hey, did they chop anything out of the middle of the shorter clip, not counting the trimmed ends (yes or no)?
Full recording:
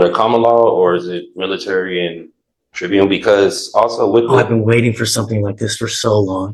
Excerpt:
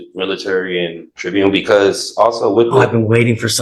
yes